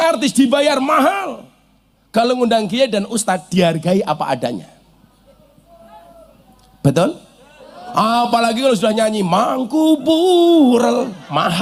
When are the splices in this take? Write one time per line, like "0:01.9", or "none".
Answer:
none